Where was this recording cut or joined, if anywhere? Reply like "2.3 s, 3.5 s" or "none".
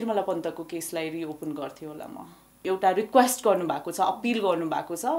2.5 s